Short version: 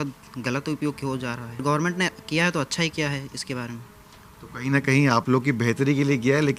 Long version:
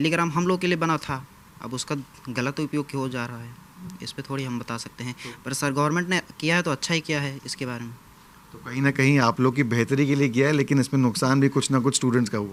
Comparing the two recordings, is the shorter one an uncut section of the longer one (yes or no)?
no